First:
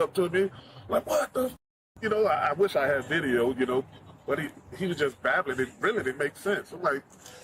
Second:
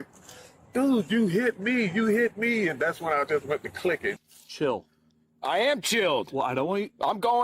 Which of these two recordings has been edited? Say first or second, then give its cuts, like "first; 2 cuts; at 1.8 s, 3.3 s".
second; 1 cut; at 4.2 s